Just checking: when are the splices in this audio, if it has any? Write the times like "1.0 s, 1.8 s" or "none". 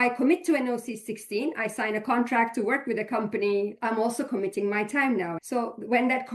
3.7 s, 5.3 s